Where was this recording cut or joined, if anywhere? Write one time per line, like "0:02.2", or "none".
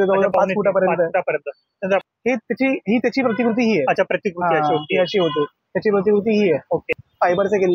0:02.0
0:06.9